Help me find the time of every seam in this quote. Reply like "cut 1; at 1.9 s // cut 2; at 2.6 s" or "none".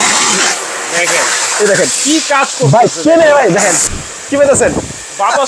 cut 1; at 3.9 s